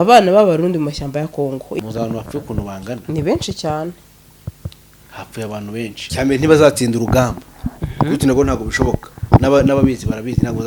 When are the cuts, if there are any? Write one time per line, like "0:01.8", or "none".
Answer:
0:01.8
0:06.0